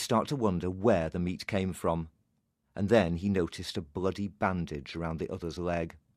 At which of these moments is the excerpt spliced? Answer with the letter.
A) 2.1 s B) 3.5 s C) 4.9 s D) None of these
B